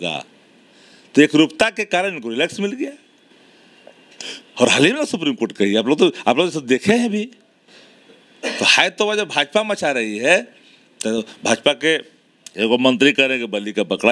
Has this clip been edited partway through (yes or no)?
no